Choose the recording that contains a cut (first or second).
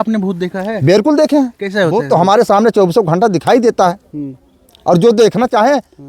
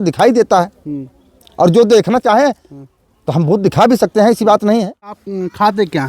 second